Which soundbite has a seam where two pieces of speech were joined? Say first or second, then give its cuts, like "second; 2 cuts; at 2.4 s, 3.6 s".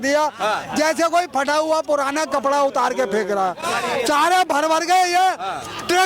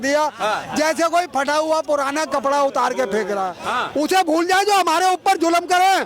second; 1 cut; at 3.6 s